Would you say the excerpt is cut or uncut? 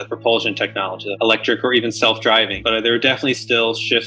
cut